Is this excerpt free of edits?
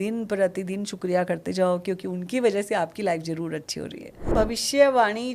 no; 1 cut; at 4.2 s

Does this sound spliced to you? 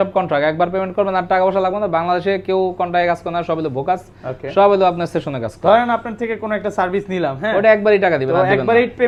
no; 0 cuts

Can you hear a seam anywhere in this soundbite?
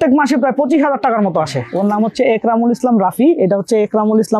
yes; 1 cut; at 1.6 s

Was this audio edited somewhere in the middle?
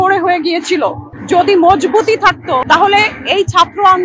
yes; 2 cuts; at 1.1 s, 2.6 s

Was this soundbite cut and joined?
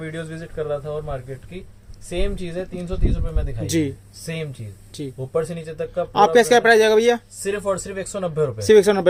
no; 0 cuts

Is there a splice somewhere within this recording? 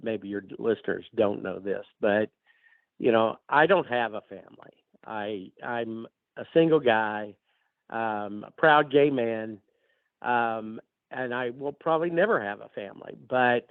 no; 0 cuts

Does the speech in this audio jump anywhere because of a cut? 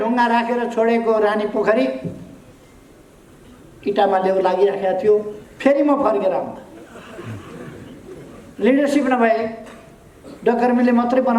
no; 0 cuts

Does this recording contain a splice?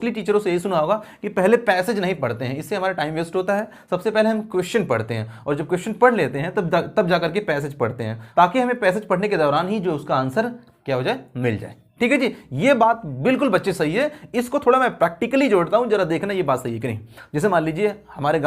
no; 0 cuts

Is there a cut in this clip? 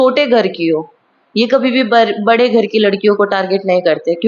no; 0 cuts

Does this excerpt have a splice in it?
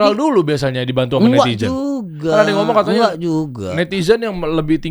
no; 0 cuts

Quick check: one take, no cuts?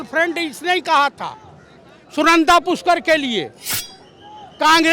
yes; 0 cuts

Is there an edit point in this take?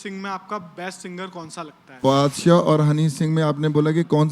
yes; 1 cut; at 2.0 s

